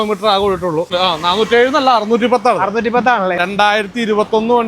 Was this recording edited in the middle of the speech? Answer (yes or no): yes